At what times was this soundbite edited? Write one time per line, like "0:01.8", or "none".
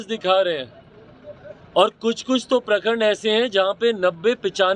none